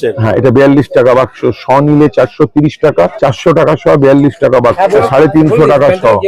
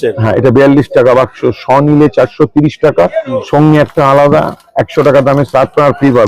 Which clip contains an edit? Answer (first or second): first